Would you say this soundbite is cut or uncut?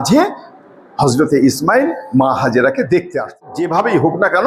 cut